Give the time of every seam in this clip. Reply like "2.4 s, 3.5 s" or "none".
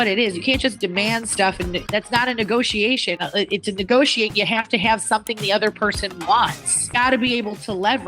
1.8 s, 6.9 s